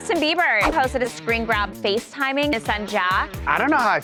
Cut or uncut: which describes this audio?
uncut